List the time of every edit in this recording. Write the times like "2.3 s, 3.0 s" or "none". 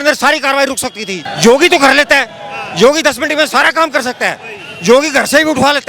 1.1 s

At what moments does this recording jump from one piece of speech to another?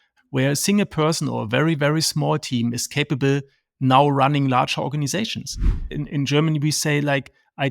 5.9 s

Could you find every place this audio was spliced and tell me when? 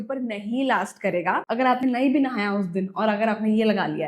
1.4 s

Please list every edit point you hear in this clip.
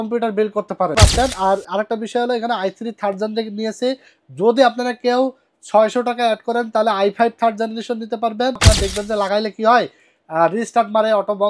0.9 s, 8.6 s

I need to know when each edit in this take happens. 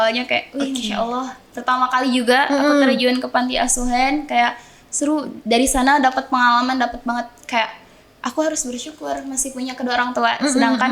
none

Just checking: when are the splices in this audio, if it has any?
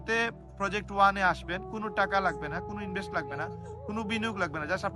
none

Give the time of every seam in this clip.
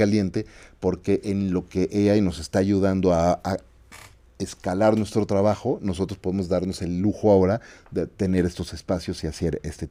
none

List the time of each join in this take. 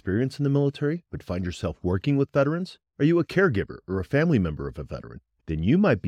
none

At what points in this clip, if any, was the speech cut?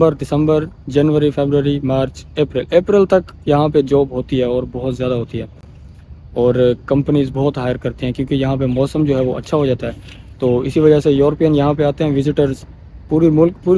none

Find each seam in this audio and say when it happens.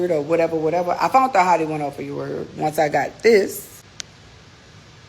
3.8 s

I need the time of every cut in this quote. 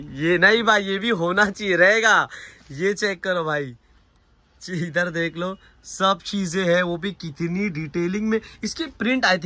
none

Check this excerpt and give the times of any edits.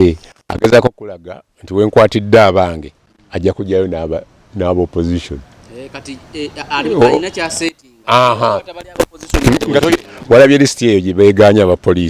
10.1 s

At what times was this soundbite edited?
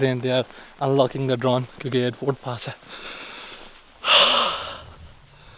none

